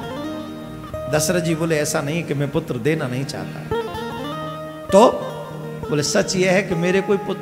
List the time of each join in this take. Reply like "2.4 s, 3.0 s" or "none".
none